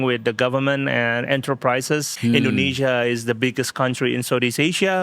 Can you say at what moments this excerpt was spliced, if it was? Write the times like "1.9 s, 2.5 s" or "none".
2.1 s